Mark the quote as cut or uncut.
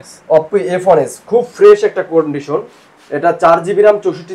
uncut